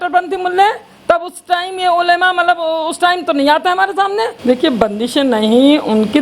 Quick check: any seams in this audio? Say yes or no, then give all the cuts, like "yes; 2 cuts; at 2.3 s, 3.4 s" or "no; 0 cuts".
yes; 1 cut; at 4.4 s